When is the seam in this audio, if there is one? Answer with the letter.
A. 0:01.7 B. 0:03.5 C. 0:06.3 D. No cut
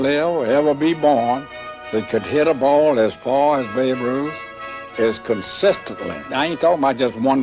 C